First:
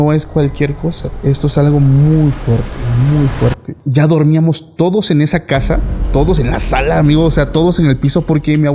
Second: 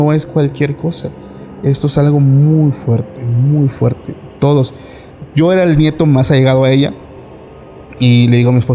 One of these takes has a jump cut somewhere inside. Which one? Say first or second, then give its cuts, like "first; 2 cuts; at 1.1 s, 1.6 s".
first; 2 cuts; at 1.1 s, 3.7 s